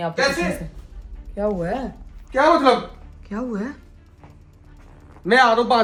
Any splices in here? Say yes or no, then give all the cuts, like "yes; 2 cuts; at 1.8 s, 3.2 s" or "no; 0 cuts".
no; 0 cuts